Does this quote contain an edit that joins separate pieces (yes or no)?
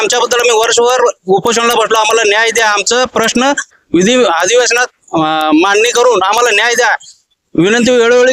no